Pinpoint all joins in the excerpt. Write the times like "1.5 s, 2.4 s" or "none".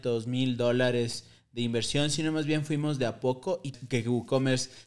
3.8 s

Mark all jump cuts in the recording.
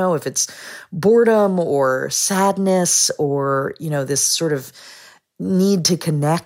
none

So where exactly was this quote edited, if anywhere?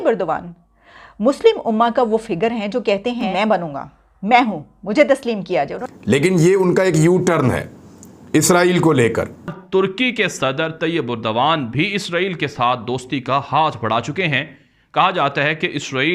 3.3 s, 5.8 s, 9.6 s

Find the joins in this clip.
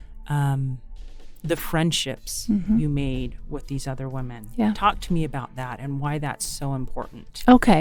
none

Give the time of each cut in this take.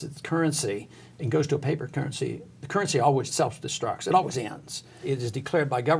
3.3 s, 5.0 s

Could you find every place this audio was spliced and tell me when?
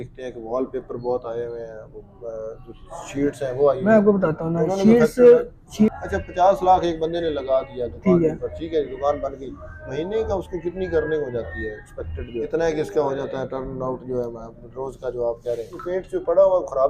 5.9 s, 12.5 s, 15.8 s

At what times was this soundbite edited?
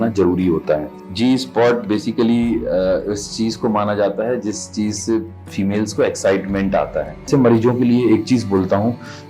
1.0 s, 7.3 s

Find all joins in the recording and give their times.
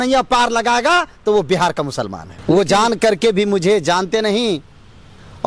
2.3 s

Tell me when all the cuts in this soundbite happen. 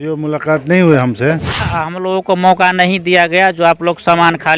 1.6 s

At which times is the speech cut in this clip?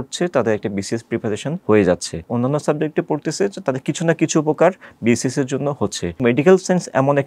1.5 s, 2.3 s, 6.2 s

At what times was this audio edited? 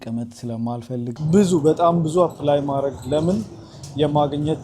1.1 s

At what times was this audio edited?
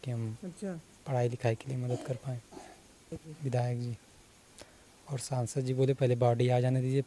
3.3 s

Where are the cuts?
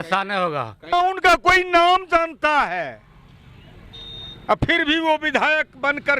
0.9 s

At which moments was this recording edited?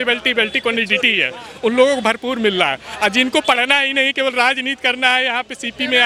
none

